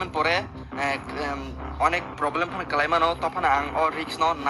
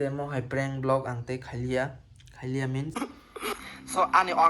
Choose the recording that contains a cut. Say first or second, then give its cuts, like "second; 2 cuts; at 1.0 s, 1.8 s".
second; 1 cut; at 2.9 s